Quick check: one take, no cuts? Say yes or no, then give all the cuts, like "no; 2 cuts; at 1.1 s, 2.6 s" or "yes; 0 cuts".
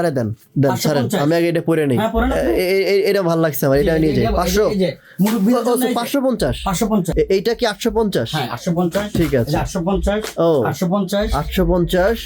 no; 1 cut; at 7.1 s